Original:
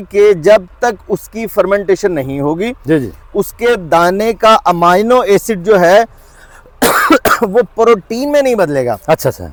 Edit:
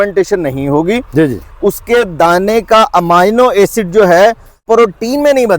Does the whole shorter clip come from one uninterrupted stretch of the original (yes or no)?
no